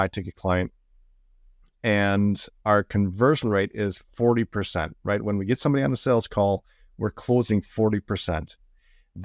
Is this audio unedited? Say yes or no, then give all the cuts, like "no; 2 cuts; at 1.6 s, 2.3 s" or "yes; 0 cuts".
yes; 0 cuts